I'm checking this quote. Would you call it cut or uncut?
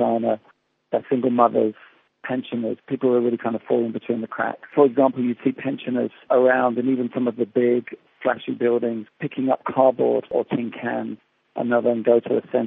cut